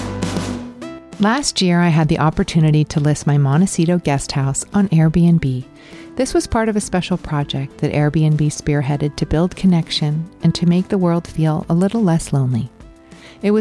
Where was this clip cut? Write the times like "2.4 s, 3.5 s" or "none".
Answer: 1.0 s